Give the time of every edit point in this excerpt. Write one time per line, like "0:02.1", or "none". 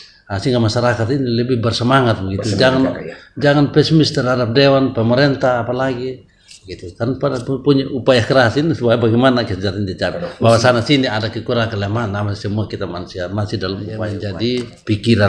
0:14.2